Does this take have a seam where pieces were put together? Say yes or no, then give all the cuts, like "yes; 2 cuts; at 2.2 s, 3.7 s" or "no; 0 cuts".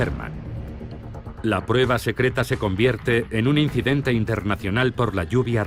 no; 0 cuts